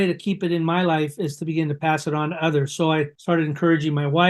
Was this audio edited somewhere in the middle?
no; 0 cuts

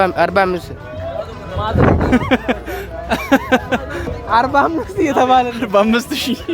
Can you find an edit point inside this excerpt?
yes; 1 cut; at 4.1 s

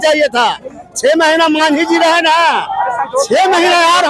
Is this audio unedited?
yes; 0 cuts

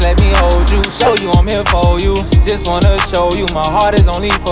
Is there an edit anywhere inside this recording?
no; 0 cuts

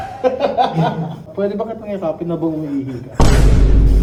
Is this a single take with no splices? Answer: yes; 0 cuts

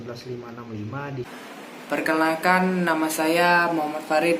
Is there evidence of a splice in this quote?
yes; 1 cut; at 1.4 s

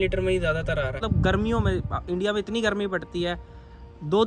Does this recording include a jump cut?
yes; 1 cut; at 1.0 s

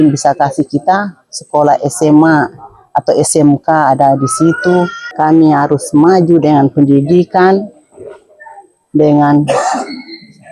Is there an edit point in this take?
yes; 1 cut; at 5.0 s

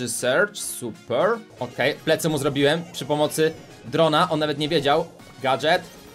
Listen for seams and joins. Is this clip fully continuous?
no; 2 cuts; at 1.6 s, 5.2 s

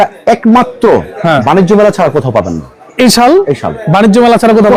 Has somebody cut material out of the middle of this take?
no; 0 cuts

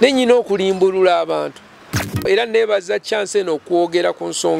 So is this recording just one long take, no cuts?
no; 1 cut; at 2.3 s

